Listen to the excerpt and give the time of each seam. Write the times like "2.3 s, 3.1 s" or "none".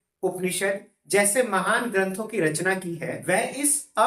3.1 s